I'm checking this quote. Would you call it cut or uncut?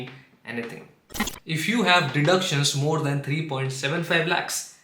cut